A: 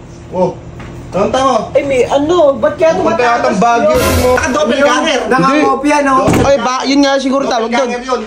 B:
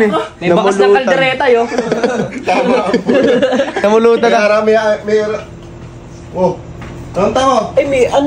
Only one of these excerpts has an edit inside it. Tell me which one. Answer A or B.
A